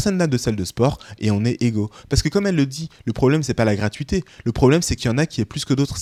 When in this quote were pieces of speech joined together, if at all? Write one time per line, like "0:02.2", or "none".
none